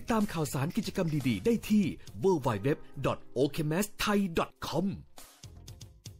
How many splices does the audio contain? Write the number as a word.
one